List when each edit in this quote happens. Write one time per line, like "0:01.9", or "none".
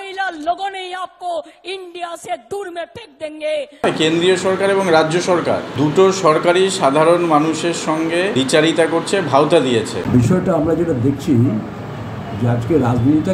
0:03.8
0:05.7
0:08.3
0:10.0